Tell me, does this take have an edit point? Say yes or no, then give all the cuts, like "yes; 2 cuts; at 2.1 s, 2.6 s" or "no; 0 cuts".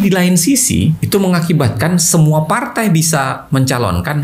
yes; 1 cut; at 1.0 s